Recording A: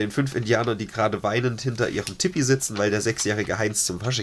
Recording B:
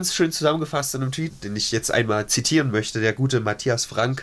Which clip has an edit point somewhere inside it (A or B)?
B